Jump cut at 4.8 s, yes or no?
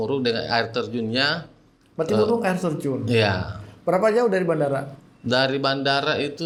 no